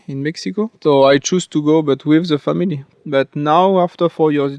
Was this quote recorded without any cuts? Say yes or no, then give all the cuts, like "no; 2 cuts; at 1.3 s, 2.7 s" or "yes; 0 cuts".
no; 1 cut; at 2.9 s